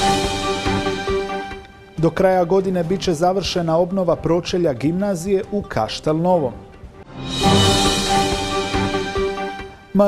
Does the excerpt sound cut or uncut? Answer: uncut